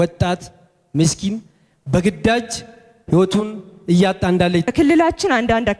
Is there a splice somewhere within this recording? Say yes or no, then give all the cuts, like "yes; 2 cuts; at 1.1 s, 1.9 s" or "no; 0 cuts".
yes; 1 cut; at 4.6 s